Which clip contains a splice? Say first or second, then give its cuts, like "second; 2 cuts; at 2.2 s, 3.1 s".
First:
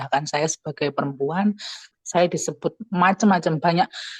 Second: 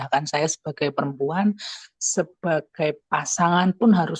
first; 1 cut; at 1.9 s